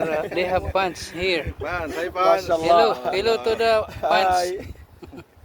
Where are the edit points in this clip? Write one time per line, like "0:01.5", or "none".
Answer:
none